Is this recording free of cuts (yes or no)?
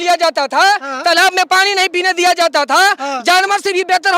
yes